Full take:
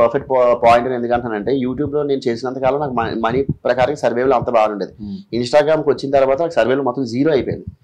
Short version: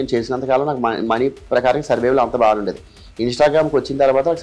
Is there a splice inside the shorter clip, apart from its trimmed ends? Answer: no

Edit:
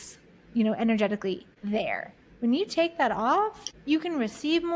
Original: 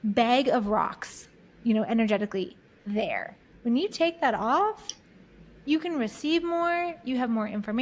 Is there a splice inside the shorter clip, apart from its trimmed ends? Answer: yes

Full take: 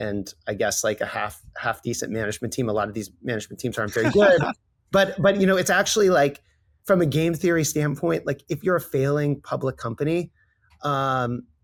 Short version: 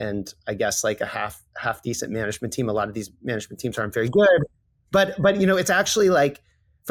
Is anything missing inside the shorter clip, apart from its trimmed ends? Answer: no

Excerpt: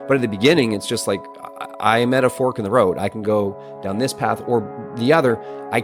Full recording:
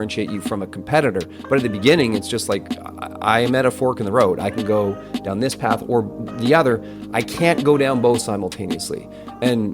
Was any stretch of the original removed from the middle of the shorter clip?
no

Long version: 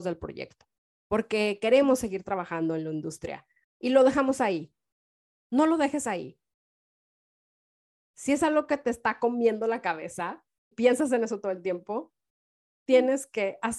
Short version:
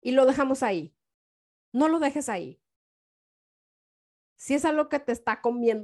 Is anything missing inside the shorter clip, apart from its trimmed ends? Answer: no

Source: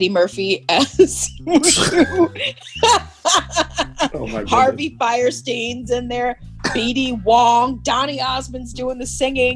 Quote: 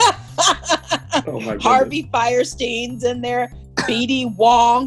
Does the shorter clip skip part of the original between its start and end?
no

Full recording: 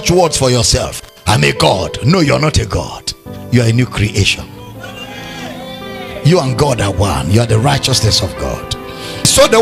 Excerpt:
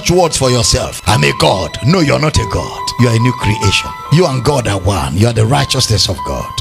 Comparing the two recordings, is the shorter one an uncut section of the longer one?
no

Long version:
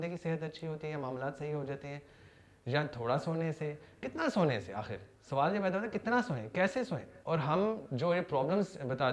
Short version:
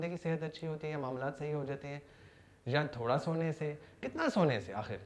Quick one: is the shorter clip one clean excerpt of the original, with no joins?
yes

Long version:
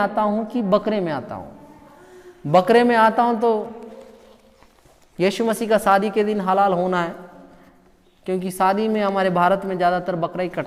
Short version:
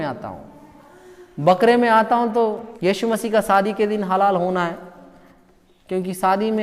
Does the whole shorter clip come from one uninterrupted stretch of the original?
no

